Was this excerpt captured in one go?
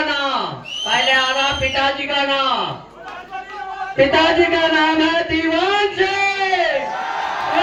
yes; 0 cuts

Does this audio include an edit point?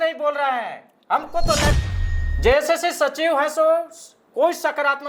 yes; 1 cut; at 1.8 s

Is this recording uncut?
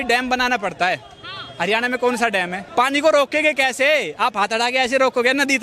no; 1 cut; at 2.6 s

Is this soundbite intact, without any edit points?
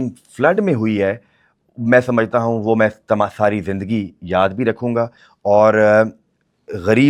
yes; 0 cuts

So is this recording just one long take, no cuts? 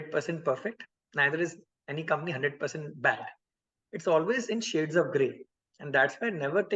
yes; 0 cuts

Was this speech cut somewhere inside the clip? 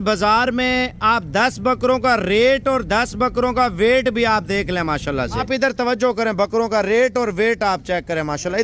yes; 1 cut; at 5.4 s

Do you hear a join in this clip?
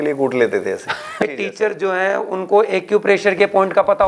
yes; 1 cut; at 1.2 s

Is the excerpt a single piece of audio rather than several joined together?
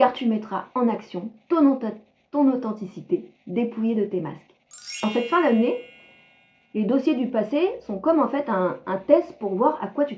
no; 1 cut; at 5.0 s

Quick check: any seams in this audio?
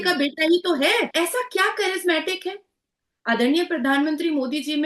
yes; 1 cut; at 1.1 s

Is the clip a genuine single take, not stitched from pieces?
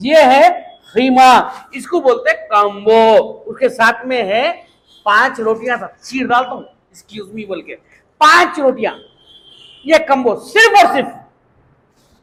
yes; 0 cuts

